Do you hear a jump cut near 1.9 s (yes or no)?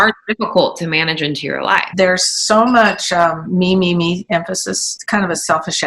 yes